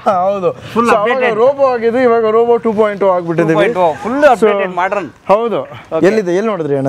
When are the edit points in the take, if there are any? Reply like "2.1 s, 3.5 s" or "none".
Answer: none